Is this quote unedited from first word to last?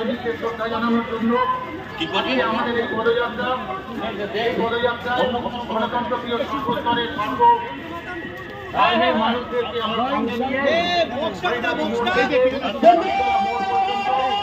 yes; 0 cuts

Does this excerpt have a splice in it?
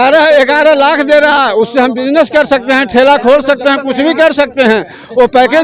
no; 0 cuts

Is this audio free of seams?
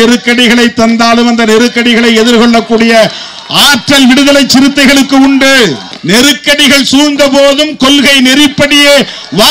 yes; 0 cuts

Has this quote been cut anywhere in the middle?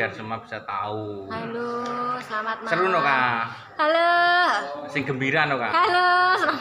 no; 0 cuts

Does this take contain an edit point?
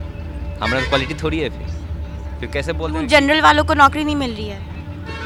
no; 0 cuts

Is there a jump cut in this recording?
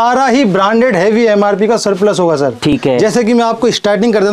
no; 0 cuts

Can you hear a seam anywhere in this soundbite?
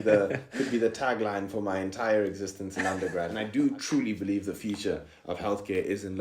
yes; 1 cut; at 3.4 s

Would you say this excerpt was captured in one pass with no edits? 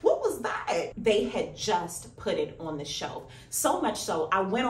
no; 1 cut; at 0.9 s

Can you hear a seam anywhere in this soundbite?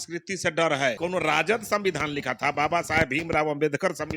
yes; 1 cut; at 1.0 s

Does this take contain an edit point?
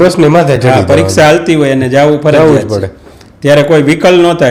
no; 0 cuts

